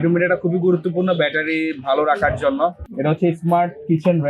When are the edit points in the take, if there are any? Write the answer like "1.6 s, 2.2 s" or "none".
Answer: 2.9 s